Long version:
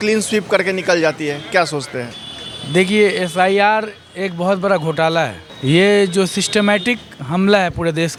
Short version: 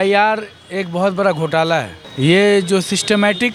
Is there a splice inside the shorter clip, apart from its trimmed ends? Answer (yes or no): no